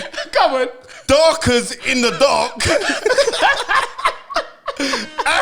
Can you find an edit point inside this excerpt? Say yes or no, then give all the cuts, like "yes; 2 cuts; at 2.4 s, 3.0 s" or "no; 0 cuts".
no; 0 cuts